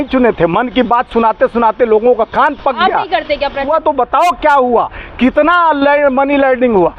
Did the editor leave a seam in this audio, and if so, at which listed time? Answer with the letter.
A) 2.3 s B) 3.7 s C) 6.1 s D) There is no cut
B